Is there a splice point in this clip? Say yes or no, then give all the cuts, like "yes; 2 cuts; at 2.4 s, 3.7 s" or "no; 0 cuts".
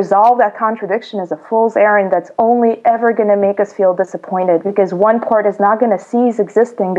no; 0 cuts